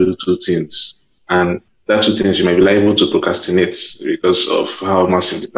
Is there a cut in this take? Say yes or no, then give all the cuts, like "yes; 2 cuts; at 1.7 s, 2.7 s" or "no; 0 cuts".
yes; 1 cut; at 1.4 s